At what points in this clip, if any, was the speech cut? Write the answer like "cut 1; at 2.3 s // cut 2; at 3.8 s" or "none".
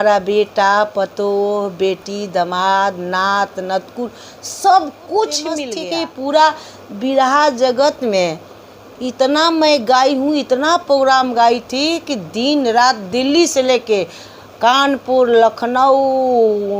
cut 1; at 5.7 s